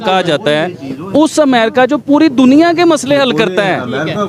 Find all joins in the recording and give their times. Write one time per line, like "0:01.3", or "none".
none